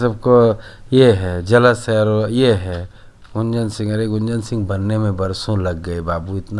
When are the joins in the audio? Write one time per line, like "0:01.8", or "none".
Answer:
none